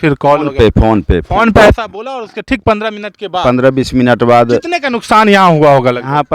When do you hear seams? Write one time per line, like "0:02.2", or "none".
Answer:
none